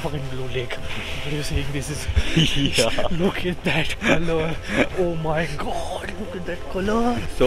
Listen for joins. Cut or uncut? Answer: uncut